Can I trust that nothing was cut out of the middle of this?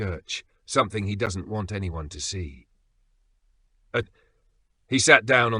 no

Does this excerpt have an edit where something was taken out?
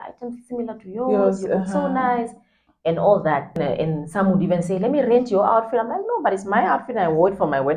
yes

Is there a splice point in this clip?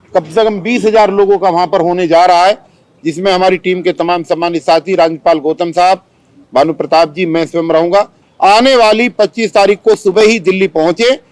yes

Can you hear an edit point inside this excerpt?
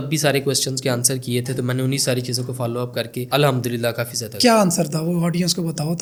no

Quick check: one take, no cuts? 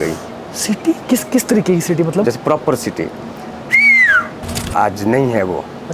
no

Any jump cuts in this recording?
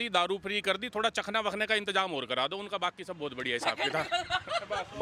no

